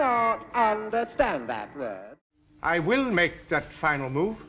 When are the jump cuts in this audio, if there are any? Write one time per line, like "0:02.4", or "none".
0:02.0